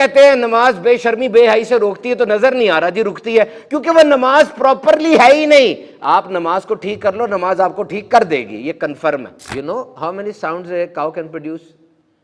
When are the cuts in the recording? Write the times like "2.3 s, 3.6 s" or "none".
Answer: 9.4 s

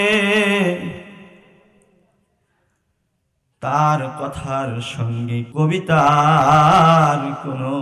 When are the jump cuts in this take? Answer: 5.5 s

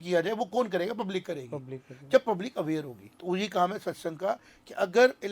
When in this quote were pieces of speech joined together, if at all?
none

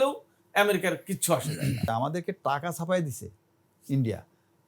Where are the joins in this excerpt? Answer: 1.9 s

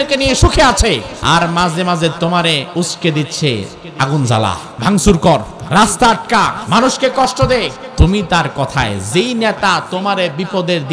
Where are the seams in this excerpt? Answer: 1.1 s, 2.7 s, 4.7 s, 5.6 s, 6.6 s, 7.8 s

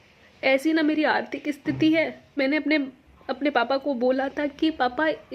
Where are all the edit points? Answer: 2.4 s

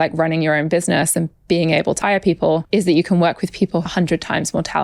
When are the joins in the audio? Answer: 2.3 s, 3.8 s

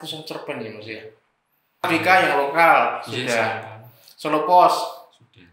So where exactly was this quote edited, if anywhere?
1.9 s

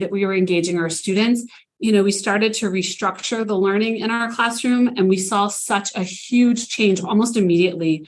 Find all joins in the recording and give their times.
1.6 s

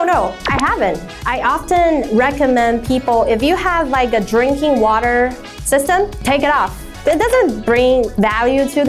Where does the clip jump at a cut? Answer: 1.1 s

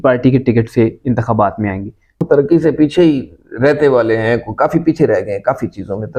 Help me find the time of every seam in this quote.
2.2 s

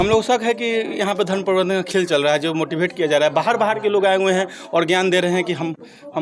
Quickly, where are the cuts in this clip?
none

